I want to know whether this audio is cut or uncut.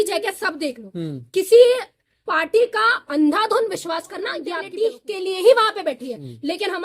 cut